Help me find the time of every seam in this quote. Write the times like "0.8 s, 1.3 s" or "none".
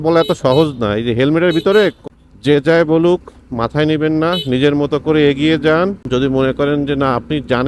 2.0 s, 6.0 s